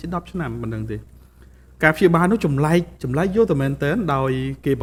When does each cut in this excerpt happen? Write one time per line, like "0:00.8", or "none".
none